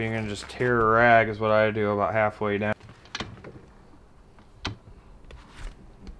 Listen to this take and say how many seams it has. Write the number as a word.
one